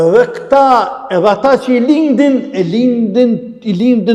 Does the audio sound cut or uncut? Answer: uncut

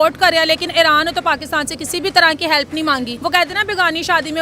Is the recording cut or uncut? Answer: cut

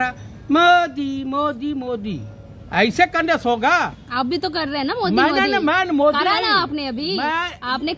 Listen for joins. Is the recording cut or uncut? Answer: uncut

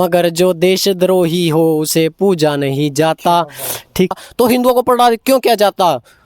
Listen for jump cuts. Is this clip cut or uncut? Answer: cut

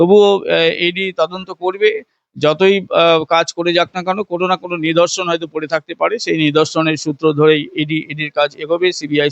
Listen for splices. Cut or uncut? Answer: uncut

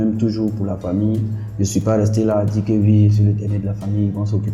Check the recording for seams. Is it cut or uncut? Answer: uncut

